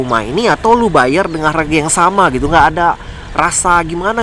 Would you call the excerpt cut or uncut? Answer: uncut